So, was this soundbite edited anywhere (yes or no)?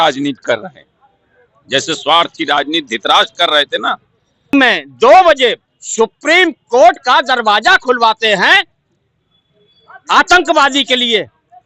yes